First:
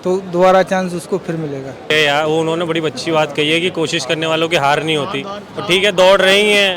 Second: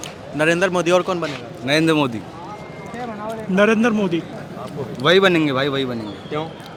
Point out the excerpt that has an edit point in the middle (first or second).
first